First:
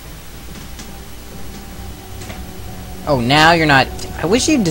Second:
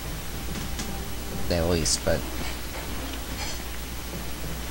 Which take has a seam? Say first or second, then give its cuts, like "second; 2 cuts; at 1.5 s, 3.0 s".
first; 1 cut; at 1.5 s